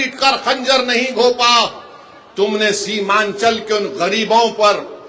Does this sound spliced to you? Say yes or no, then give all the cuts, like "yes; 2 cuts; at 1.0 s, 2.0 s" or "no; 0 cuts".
no; 0 cuts